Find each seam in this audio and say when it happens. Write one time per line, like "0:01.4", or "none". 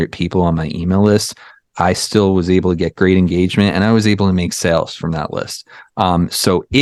none